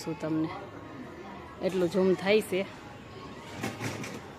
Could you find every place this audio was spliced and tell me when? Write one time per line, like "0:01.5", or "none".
none